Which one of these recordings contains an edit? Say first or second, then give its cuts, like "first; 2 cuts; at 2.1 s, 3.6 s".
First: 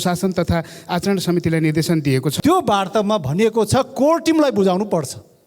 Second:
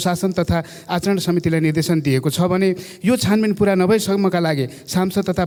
first; 1 cut; at 2.3 s